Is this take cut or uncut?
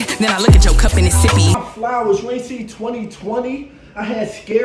cut